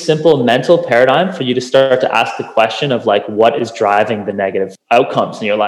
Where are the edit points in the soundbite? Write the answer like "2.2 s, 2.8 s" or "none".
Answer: 4.8 s